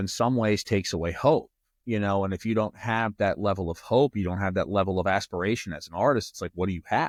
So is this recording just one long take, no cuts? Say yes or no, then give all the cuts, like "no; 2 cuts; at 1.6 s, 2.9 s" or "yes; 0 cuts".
yes; 0 cuts